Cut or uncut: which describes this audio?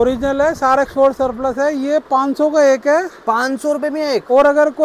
uncut